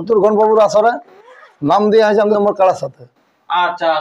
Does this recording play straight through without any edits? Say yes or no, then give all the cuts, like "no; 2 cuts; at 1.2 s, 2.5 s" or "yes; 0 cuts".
no; 1 cut; at 2.3 s